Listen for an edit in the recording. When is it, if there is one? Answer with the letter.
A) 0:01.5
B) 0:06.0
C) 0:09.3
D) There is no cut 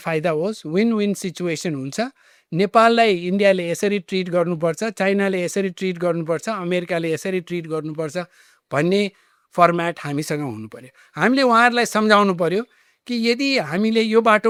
D